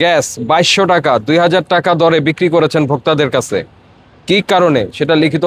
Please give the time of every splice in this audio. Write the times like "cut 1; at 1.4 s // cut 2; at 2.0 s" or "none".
none